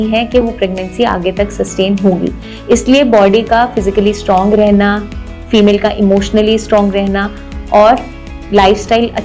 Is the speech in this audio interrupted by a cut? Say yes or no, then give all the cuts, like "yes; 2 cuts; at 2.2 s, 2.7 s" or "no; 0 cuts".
no; 0 cuts